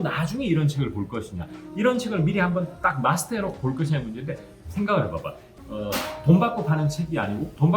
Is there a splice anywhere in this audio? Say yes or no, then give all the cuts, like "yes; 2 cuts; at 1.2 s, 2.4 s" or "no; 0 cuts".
yes; 1 cut; at 5.4 s